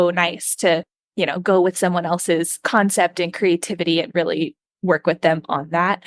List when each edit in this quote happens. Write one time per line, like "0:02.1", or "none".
0:01.0